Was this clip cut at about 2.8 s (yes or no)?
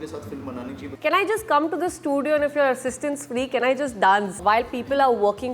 no